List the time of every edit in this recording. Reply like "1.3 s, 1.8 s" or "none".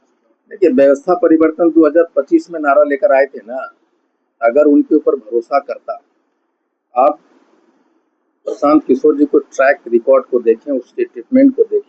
none